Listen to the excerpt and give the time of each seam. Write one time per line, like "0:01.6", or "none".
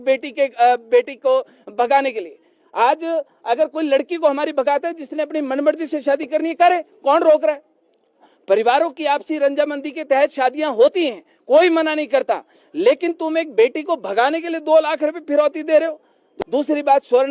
0:16.3